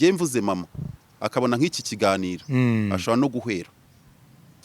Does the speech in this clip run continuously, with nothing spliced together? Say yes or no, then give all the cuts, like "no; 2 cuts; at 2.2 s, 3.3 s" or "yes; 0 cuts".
yes; 0 cuts